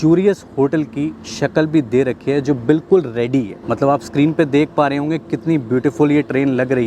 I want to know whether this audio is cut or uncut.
uncut